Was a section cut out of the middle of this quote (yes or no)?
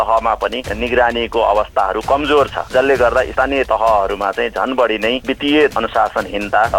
yes